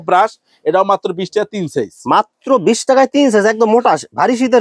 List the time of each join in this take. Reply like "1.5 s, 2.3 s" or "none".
none